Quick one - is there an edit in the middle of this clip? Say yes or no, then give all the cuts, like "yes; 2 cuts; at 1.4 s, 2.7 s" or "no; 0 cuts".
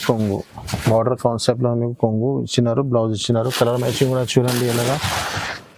no; 0 cuts